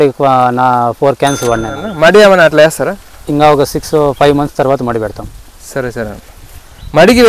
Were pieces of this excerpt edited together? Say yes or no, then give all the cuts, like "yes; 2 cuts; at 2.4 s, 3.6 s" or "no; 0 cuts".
yes; 1 cut; at 1.8 s